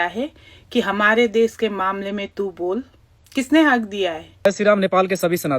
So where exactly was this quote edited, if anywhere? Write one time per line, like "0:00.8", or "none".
0:04.3